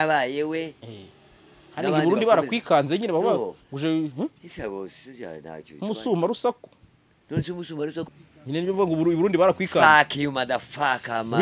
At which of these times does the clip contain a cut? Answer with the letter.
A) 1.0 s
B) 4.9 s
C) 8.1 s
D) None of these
C